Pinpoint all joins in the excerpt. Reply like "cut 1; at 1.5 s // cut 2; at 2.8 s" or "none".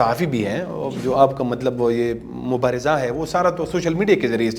cut 1; at 0.9 s